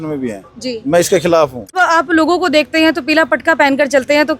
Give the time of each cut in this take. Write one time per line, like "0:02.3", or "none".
0:01.8